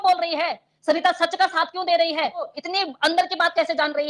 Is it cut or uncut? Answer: uncut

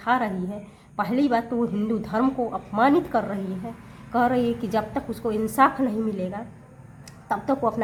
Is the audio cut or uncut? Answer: uncut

